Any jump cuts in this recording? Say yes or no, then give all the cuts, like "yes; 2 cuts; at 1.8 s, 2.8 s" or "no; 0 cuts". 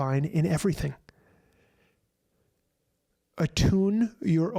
no; 0 cuts